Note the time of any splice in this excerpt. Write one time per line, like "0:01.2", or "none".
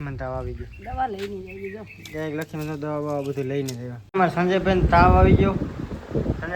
0:04.2

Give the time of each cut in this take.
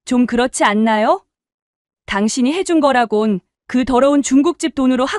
none

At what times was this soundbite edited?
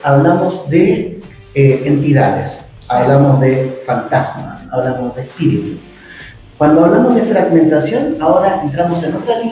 none

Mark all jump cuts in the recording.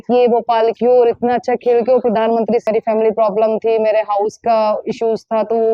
0:02.6

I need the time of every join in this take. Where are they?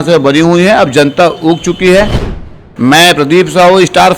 0:02.4

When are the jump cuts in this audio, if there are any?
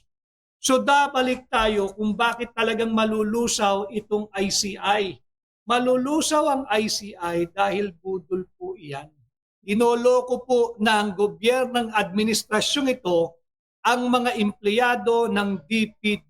0:09.5

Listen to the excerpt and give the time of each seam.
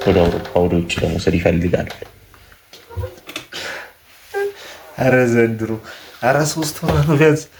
none

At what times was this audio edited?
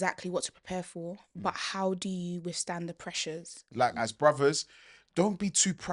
0:03.7

